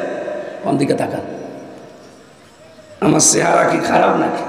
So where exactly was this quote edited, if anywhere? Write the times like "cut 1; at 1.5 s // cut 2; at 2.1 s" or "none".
none